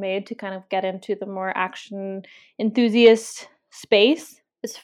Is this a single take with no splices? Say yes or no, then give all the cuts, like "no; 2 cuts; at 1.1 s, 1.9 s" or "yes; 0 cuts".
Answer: yes; 0 cuts